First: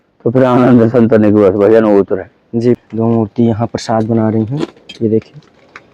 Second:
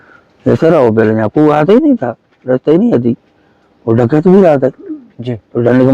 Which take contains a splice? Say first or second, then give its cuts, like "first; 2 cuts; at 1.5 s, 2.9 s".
first; 1 cut; at 2.8 s